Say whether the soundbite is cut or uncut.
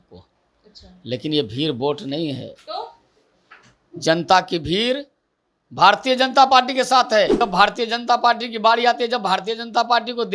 cut